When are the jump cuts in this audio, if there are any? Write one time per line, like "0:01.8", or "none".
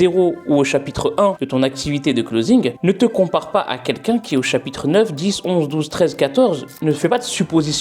0:01.4
0:06.7

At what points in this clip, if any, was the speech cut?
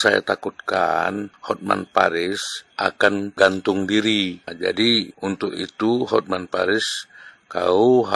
0:01.3
0:03.0
0:04.5
0:05.1

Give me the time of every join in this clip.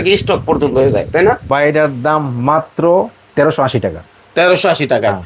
0:01.4

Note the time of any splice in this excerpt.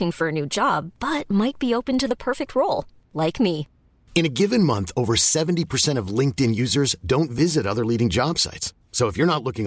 none

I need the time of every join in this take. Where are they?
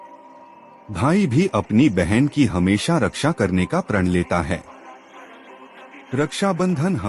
none

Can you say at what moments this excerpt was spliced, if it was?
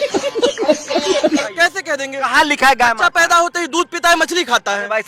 0:01.4

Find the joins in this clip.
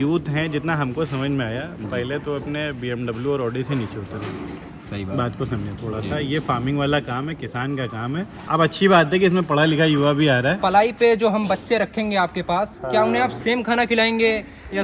0:08.4
0:10.6

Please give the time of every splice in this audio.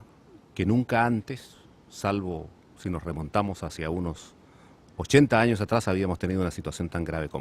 0:05.8

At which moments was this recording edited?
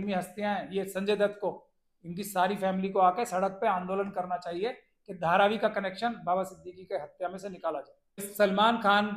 0:08.3

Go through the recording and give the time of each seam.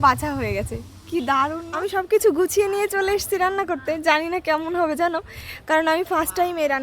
0:01.7

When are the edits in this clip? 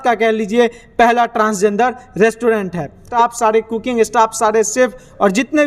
0:03.1

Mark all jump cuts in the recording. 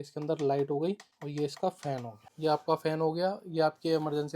0:01.1
0:02.2

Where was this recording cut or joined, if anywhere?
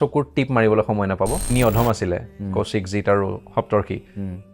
0:01.5

